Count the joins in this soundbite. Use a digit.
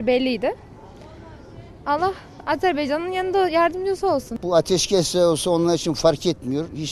1